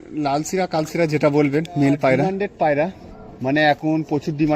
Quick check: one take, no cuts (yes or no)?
no